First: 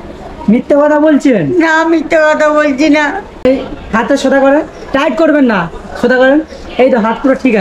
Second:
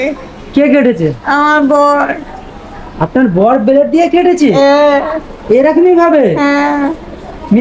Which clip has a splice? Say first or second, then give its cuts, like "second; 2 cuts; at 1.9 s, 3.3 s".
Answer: first; 1 cut; at 3.5 s